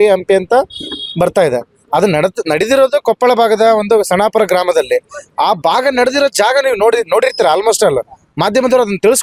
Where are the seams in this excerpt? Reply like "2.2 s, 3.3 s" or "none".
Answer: none